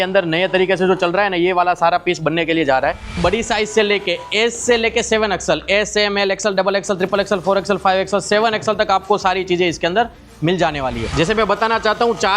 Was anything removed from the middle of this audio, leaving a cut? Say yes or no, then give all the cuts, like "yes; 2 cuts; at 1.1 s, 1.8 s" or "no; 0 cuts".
yes; 2 cuts; at 3.2 s, 11.1 s